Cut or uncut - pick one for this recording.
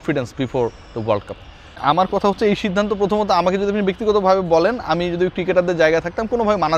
uncut